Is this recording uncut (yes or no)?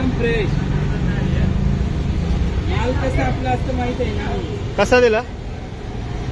yes